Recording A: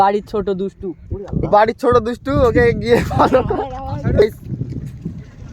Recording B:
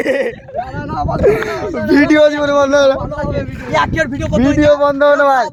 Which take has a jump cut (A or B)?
A